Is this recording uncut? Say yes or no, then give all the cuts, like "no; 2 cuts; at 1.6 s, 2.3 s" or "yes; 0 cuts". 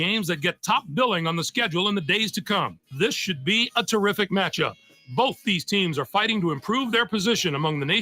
no; 1 cut; at 2.8 s